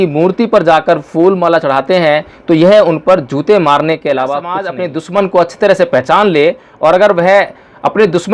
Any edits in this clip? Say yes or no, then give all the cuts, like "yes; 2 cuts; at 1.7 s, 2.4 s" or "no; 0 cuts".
yes; 1 cut; at 4.7 s